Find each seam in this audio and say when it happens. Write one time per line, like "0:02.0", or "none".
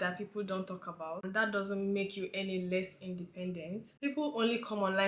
0:01.2
0:03.9

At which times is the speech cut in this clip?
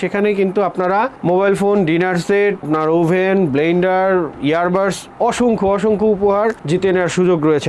none

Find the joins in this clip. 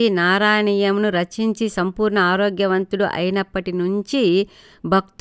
none

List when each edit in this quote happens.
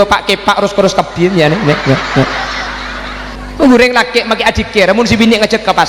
0:03.3

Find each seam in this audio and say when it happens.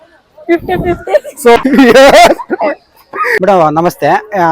0:01.6
0:03.4

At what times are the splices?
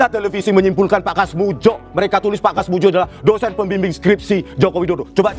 none

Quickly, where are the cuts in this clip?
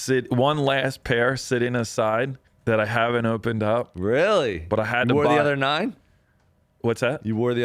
0:02.5

